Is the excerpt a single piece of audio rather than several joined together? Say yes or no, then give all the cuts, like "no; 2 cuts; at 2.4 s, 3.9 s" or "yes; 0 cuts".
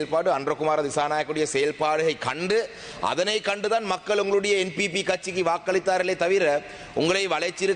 yes; 0 cuts